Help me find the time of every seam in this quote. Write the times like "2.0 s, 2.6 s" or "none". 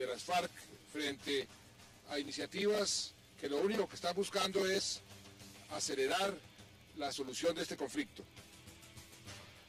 none